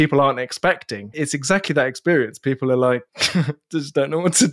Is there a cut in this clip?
yes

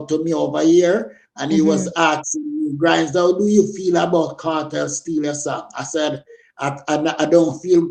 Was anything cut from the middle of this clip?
no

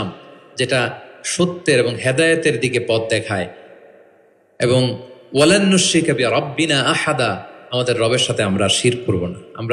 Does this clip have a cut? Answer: no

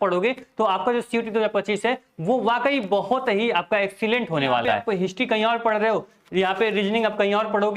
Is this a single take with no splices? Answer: no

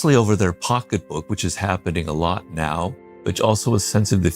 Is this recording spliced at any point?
no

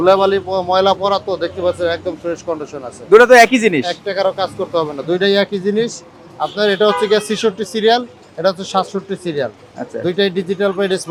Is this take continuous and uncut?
yes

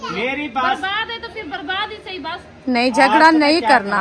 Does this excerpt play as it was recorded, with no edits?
yes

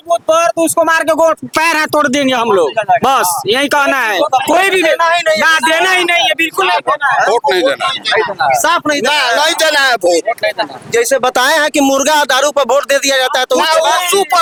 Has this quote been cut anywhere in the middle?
no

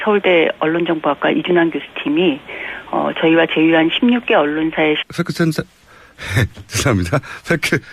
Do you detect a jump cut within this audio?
no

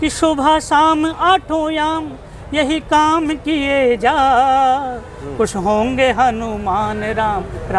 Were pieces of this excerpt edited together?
no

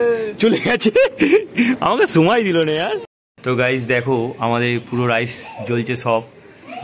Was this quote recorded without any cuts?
no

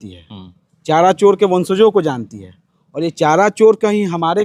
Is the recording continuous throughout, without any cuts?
yes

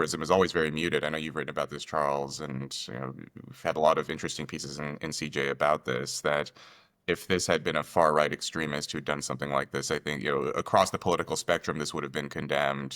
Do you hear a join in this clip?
no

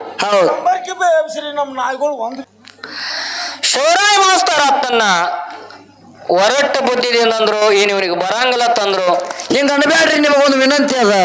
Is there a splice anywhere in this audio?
yes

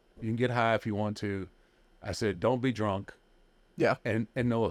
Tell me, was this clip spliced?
no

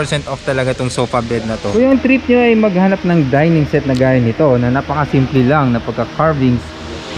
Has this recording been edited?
yes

